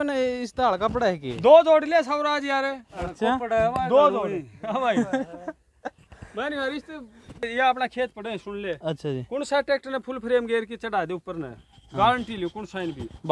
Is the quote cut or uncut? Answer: cut